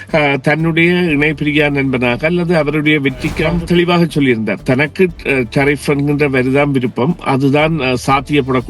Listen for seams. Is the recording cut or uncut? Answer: cut